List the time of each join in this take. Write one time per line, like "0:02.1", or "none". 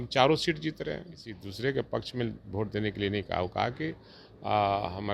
0:01.5